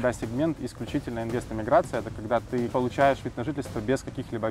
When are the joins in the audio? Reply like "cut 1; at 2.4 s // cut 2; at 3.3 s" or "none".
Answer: cut 1; at 2.7 s

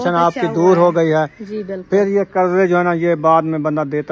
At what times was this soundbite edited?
none

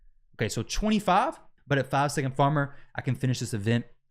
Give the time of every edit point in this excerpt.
cut 1; at 1.5 s

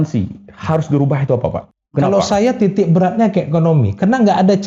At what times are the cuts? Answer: cut 1; at 1.7 s

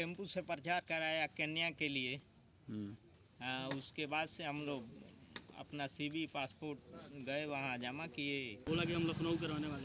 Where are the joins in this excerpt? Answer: cut 1; at 8.6 s

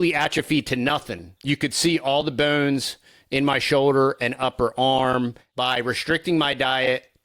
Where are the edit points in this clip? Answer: cut 1; at 1.3 s // cut 2; at 5.4 s

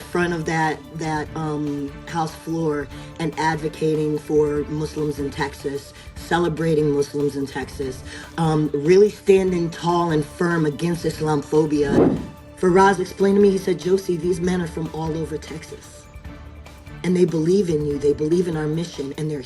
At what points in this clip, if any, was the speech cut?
cut 1; at 12.0 s

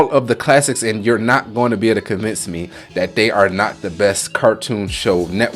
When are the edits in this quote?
none

